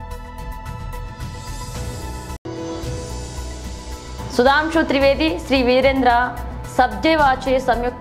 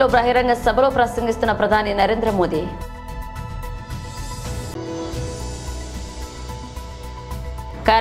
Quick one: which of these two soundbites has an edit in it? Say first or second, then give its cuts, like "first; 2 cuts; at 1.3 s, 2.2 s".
second; 3 cuts; at 2.8 s, 4.3 s, 6.4 s